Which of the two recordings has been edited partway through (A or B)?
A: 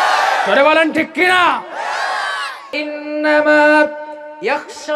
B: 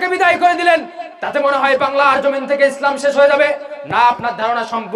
A